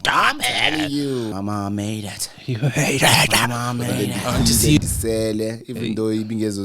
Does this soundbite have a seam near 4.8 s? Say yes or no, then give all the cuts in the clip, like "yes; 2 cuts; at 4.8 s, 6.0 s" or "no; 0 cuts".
yes; 2 cuts; at 1.3 s, 4.8 s